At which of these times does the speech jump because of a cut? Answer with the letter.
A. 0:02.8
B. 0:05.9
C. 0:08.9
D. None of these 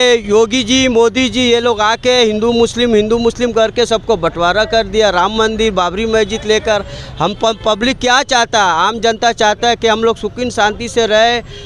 D